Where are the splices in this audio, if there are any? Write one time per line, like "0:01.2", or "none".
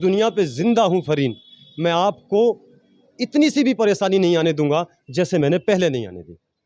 none